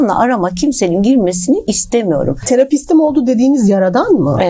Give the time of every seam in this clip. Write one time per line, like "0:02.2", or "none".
0:02.4